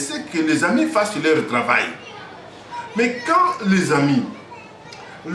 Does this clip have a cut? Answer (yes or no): no